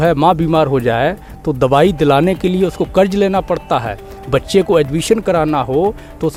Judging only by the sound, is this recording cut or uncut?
uncut